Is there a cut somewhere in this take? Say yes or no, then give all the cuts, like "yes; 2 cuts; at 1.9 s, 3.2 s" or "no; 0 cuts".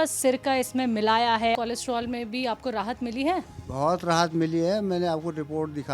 yes; 1 cut; at 1.5 s